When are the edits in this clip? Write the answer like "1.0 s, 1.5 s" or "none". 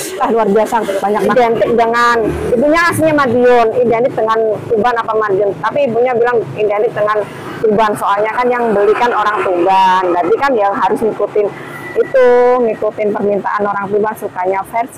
1.3 s